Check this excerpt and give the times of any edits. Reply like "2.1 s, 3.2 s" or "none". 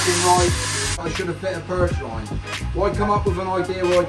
1.0 s

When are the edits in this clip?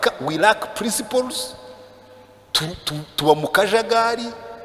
none

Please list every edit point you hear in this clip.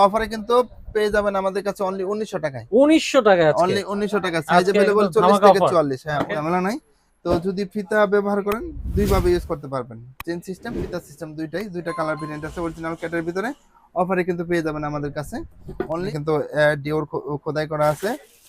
6.3 s, 16.1 s

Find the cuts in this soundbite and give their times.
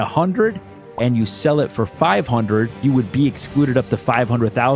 2.7 s

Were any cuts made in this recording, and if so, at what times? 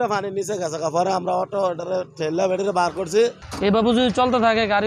3.5 s

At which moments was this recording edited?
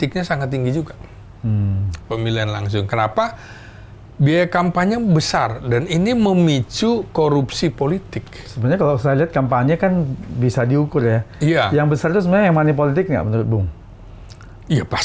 none

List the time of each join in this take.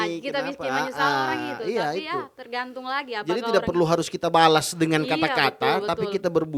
none

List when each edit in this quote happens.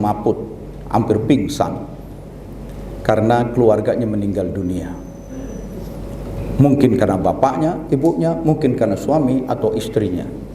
none

